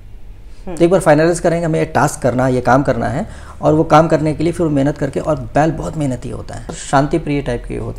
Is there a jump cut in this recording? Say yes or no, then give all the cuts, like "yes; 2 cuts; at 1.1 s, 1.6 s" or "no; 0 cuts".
yes; 1 cut; at 6.7 s